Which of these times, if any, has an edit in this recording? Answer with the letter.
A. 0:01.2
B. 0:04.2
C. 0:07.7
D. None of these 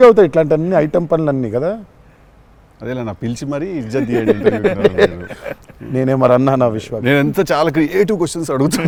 D